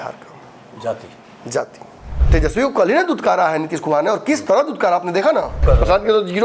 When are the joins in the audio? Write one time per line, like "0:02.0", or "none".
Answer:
0:02.2
0:05.6